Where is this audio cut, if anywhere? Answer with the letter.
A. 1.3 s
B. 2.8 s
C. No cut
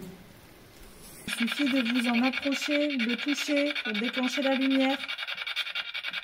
A